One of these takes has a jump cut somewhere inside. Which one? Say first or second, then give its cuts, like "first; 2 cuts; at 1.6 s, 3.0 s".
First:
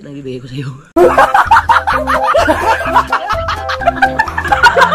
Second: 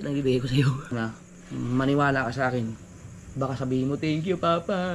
second; 1 cut; at 0.9 s